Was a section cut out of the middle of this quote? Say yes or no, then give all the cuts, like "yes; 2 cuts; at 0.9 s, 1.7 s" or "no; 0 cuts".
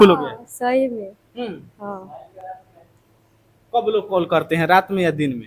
no; 0 cuts